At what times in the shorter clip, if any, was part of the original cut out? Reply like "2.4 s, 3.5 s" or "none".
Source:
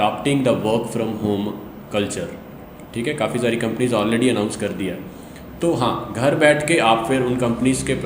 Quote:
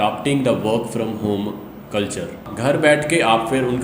2.5 s